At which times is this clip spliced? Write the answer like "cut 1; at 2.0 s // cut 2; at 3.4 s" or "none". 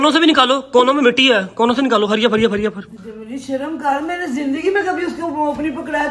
none